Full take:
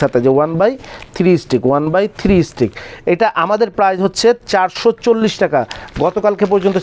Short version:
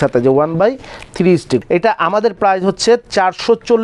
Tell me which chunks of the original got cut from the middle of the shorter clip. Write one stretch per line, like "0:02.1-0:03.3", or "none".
0:01.6-0:03.0